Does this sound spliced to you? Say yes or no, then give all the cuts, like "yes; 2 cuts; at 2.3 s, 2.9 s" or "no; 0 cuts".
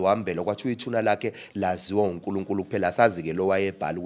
no; 0 cuts